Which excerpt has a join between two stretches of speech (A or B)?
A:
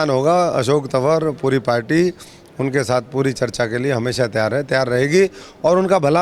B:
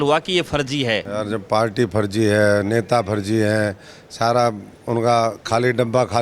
B